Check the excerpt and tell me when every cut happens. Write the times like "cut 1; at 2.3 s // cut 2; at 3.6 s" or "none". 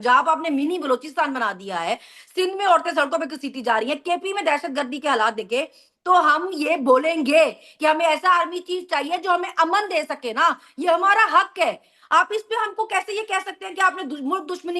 none